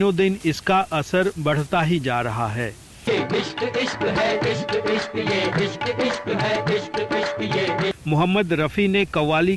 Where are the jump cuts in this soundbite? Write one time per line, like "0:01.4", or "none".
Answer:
0:08.0